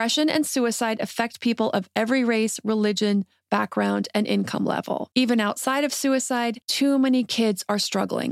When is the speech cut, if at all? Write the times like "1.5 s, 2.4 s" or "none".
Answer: 5.1 s, 6.6 s